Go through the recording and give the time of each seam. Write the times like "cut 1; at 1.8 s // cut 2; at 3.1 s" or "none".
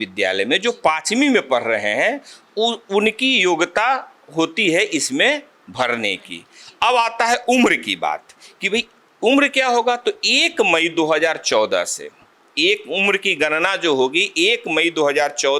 none